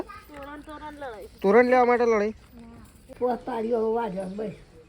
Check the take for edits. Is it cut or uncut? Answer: cut